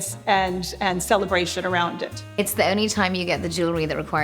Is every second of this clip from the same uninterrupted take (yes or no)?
no